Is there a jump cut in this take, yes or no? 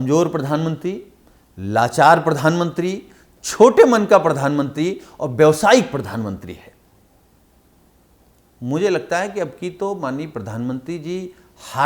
no